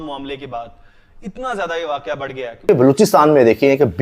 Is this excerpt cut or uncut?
cut